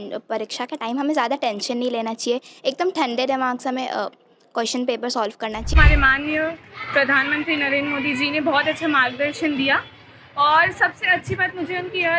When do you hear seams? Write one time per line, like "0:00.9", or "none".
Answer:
0:05.7